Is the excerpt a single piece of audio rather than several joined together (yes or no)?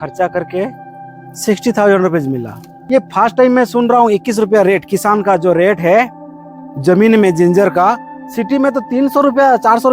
no